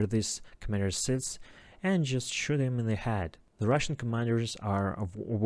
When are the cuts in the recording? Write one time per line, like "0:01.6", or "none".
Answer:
0:03.4